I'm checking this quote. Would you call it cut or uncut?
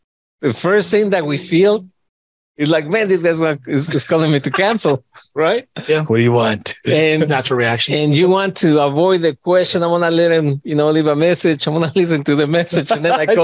uncut